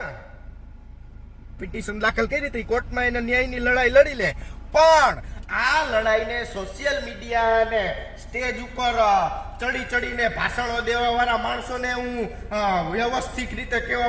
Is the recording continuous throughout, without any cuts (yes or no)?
no